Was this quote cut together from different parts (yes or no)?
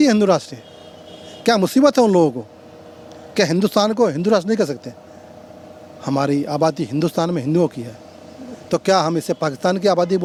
no